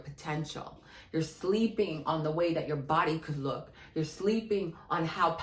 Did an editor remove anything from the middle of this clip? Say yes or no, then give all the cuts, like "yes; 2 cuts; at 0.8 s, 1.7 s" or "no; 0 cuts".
no; 0 cuts